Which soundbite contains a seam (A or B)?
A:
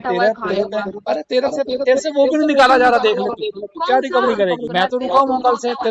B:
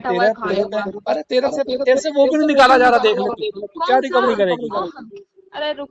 A